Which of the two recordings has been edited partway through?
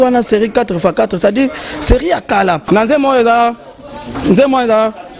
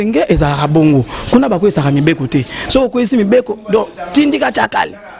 first; 1 cut; at 2.6 s

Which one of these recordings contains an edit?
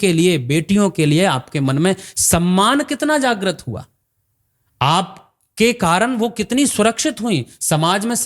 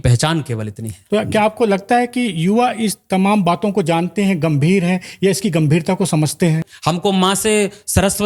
second; 2 cuts; at 1.0 s, 6.7 s

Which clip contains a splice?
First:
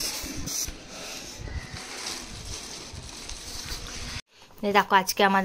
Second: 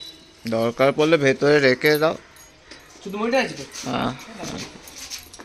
first; 1 cut; at 4.2 s

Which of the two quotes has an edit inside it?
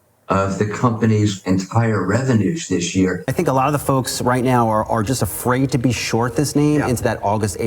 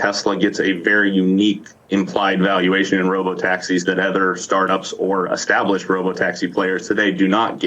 first; 1 cut; at 3.2 s

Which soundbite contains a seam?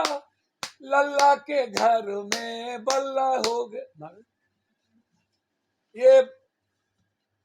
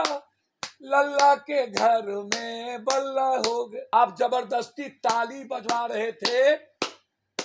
second; 1 cut; at 3.8 s

